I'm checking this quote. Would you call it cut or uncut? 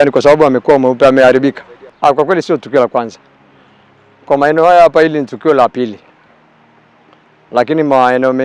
uncut